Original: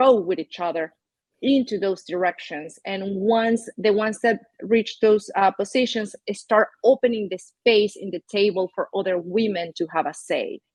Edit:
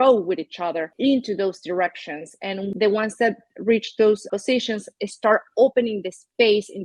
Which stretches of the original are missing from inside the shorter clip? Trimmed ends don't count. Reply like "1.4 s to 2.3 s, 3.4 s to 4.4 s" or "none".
0.9 s to 1.3 s, 3.1 s to 3.7 s, 5.3 s to 5.5 s